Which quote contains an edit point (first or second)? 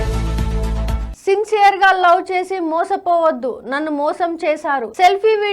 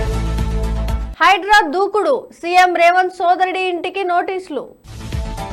first